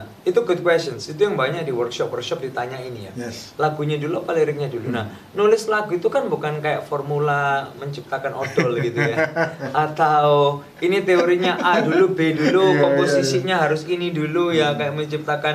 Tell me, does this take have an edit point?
no; 0 cuts

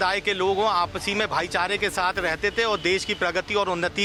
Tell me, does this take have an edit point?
no; 0 cuts

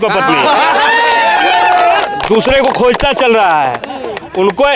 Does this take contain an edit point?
no; 0 cuts

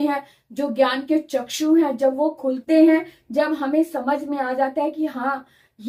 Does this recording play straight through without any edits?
yes; 0 cuts

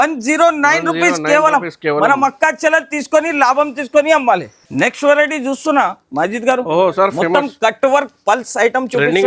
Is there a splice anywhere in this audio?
no; 0 cuts

